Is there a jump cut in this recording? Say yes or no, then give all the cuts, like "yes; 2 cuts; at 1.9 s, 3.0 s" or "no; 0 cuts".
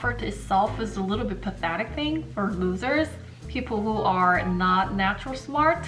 no; 0 cuts